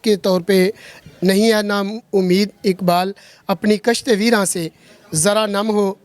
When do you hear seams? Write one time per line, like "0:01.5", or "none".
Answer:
0:01.0